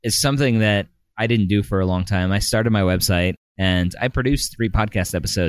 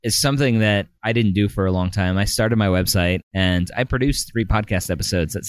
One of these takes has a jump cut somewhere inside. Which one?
second; 2 cuts; at 1.0 s, 3.3 s

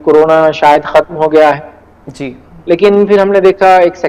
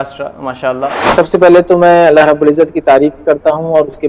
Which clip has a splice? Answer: second; 1 cut; at 1.0 s

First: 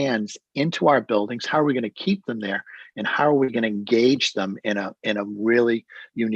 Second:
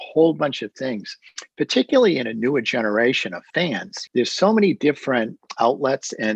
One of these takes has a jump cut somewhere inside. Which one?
second; 1 cut; at 3.8 s

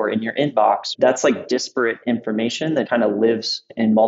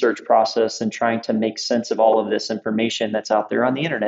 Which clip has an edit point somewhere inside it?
first; 2 cuts; at 0.9 s, 2.9 s

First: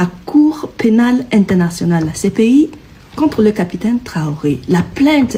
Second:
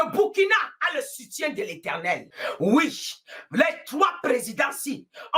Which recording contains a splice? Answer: second; 1 cut; at 2.3 s

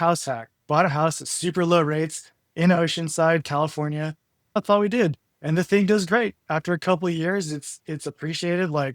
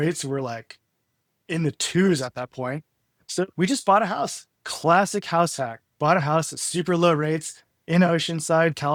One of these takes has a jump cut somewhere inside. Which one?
first; 1 cut; at 4.6 s

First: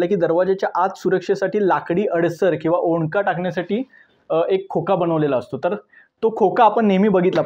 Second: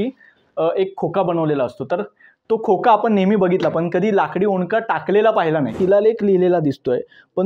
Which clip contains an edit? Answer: second; 1 cut; at 5.7 s

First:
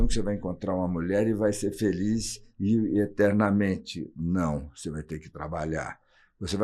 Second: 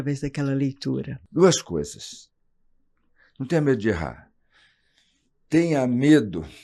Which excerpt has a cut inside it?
second; 1 cut; at 1.1 s

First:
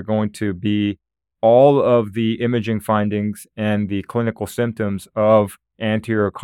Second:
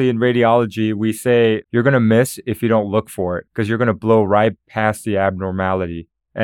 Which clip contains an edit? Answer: second; 2 cuts; at 1.6 s, 3.4 s

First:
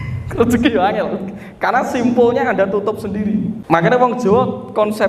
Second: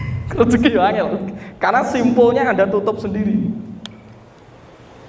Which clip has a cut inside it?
first; 1 cut; at 3.6 s

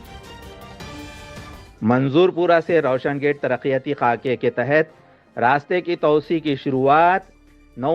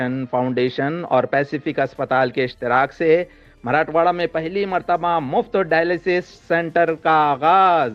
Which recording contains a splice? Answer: first; 1 cut; at 1.7 s

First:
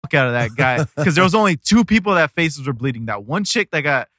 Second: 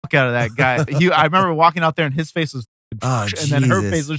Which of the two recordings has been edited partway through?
second; 1 cut; at 0.9 s

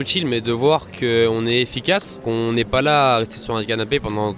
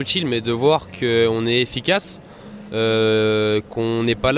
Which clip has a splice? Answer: first; 1 cut; at 2.2 s

